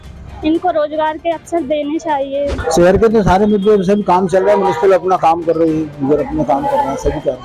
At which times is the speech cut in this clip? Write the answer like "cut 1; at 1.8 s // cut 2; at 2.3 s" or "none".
cut 1; at 2.6 s